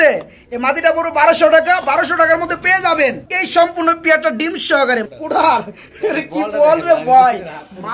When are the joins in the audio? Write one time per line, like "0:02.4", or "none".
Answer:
0:05.1